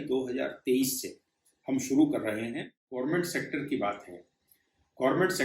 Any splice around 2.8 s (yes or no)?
yes